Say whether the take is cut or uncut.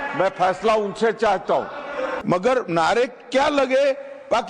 cut